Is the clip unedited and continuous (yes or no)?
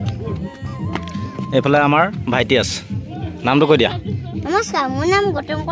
yes